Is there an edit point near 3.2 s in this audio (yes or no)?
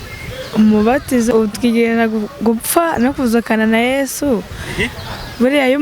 no